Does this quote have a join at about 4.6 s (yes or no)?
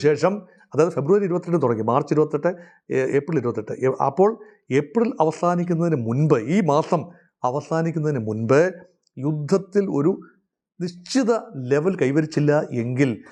no